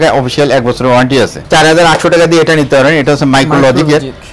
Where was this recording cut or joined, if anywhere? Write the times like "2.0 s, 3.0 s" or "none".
1.4 s